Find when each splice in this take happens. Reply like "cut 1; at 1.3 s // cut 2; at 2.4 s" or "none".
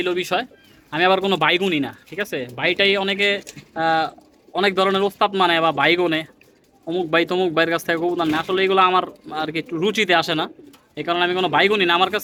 none